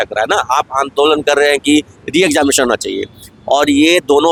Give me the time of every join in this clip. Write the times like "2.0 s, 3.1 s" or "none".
none